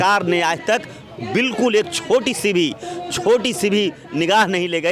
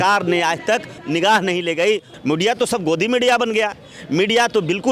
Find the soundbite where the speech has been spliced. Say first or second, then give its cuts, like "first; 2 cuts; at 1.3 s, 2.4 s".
second; 2 cuts; at 1.0 s, 2.1 s